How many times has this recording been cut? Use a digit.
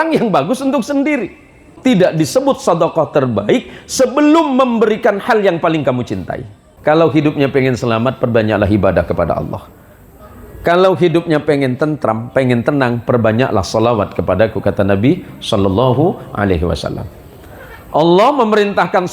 2